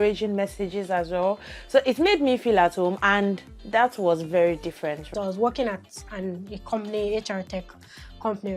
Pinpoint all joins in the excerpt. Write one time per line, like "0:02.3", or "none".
0:05.1